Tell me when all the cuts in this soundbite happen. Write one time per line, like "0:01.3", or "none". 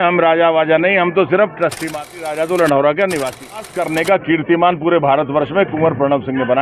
0:01.9
0:03.8